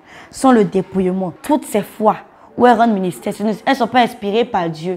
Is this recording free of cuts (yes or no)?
no